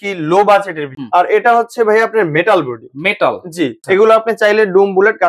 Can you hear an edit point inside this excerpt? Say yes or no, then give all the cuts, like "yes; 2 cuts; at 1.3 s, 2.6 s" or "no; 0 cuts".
yes; 2 cuts; at 1.0 s, 3.8 s